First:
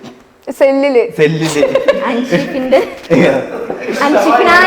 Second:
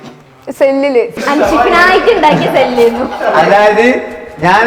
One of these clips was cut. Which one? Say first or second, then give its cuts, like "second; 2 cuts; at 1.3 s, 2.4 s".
second; 1 cut; at 1.1 s